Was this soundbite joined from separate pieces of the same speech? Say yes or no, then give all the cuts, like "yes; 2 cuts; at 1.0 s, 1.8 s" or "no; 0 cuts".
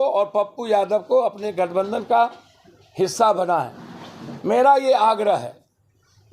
no; 0 cuts